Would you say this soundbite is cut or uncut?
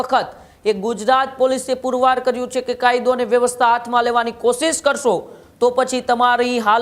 uncut